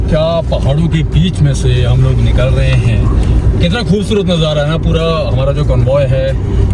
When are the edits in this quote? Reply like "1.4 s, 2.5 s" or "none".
none